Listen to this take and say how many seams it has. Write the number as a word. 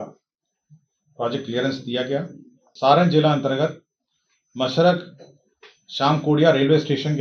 one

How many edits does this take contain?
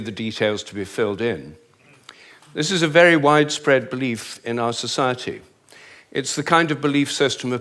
zero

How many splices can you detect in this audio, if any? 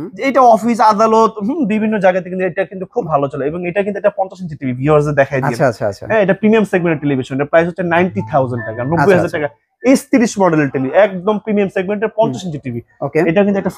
zero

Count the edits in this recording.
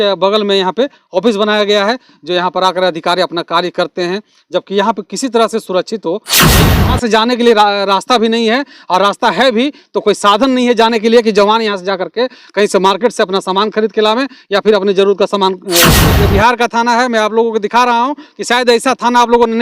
two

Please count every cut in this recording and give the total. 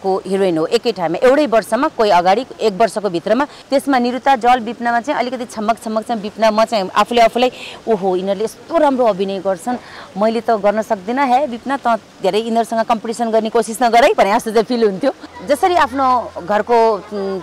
two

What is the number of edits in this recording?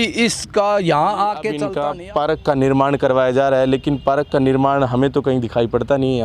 one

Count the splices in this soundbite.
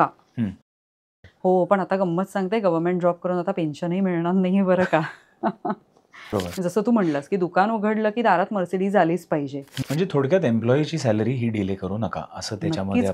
three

